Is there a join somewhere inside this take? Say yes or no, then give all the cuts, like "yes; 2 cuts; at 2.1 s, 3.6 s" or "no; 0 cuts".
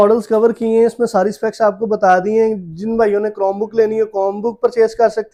no; 0 cuts